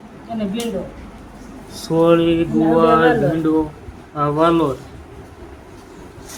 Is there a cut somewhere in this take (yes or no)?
no